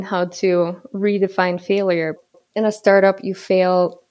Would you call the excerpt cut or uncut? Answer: cut